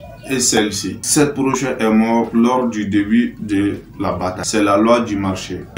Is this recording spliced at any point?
no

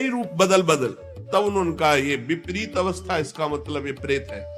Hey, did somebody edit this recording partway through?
no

